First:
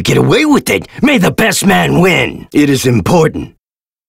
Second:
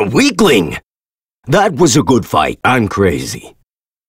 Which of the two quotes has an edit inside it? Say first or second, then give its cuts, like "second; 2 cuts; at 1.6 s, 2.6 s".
first; 1 cut; at 2.4 s